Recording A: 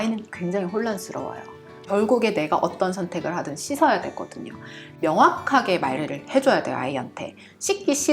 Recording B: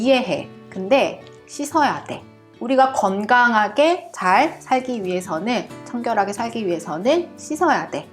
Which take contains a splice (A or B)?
A